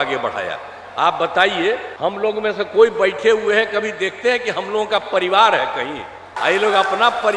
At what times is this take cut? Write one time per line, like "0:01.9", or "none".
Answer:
0:01.9
0:06.4